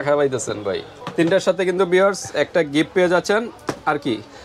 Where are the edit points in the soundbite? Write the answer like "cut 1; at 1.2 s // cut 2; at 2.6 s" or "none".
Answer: cut 1; at 1.0 s